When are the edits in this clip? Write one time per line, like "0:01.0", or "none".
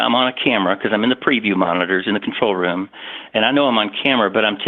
none

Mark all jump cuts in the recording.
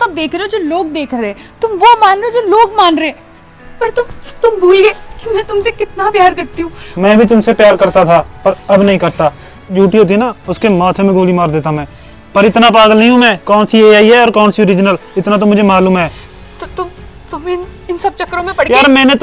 0:09.7

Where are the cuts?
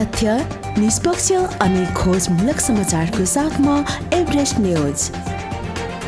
none

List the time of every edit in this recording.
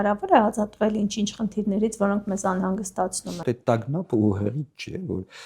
0:03.4

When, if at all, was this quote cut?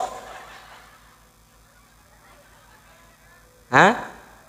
none

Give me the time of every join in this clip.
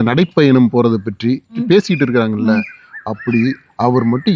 0:01.6

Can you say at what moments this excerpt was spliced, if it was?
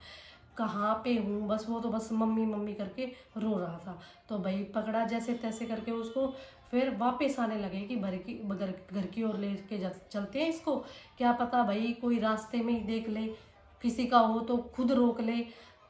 none

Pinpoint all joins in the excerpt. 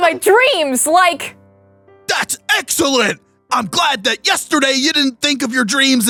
none

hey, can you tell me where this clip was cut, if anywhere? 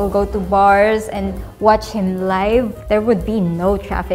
0:02.8

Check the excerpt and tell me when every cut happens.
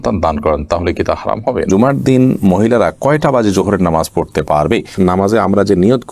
0:01.7
0:04.9

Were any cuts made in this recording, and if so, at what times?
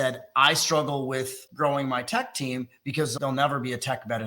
0:01.4
0:03.1

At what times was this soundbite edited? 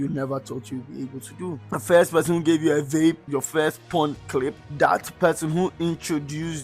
0:01.6
0:03.2

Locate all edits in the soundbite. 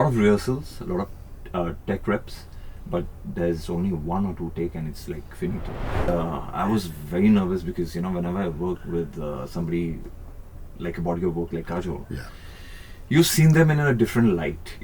0:06.1

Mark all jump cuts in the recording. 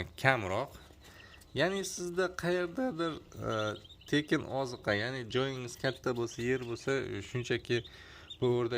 none

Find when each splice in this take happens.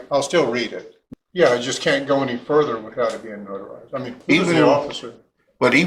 0:01.0
0:04.2

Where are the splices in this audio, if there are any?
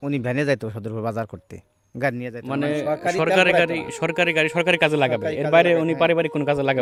none

